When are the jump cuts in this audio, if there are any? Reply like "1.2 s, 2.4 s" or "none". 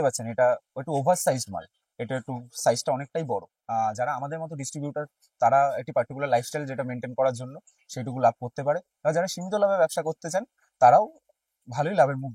3.5 s